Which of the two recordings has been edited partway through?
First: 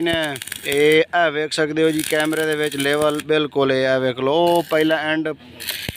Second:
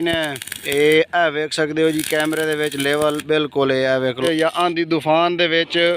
second; 1 cut; at 4.2 s

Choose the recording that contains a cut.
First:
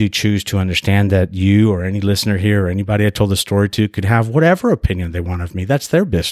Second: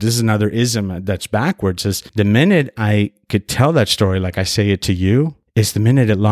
second; 2 cuts; at 2.0 s, 5.4 s

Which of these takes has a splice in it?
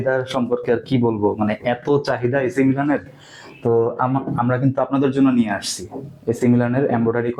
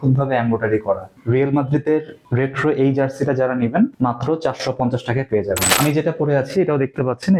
second; 4 cuts; at 1.2 s, 2.2 s, 3.9 s, 5.7 s

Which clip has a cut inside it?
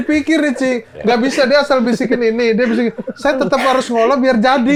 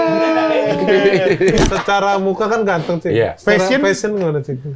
second; 1 cut; at 1.6 s

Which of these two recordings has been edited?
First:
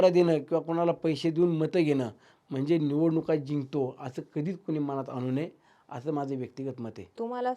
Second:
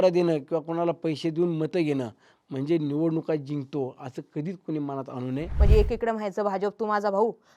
second; 1 cut; at 5.5 s

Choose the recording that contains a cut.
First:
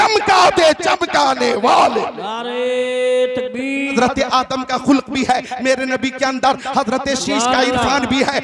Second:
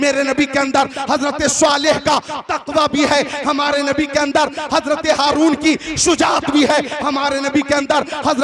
first; 1 cut; at 3.9 s

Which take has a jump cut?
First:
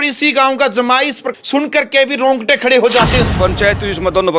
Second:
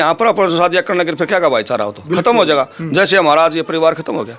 first; 2 cuts; at 1.3 s, 3.3 s

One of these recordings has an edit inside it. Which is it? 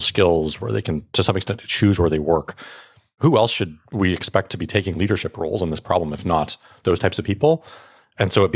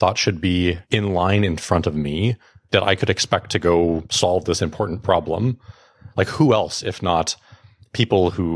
first; 1 cut; at 1.0 s

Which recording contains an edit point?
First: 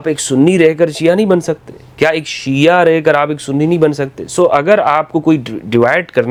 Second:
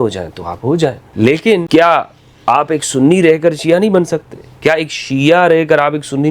second; 2 cuts; at 1.0 s, 1.7 s

